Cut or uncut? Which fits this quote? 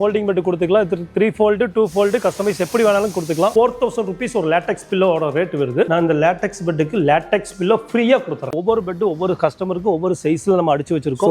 cut